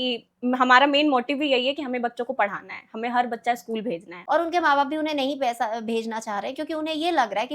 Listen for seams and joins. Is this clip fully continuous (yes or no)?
no